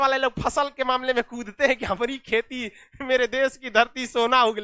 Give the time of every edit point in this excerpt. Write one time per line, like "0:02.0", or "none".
none